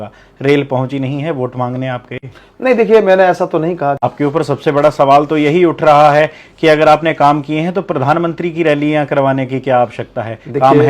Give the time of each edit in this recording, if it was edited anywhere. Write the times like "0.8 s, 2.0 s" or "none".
4.0 s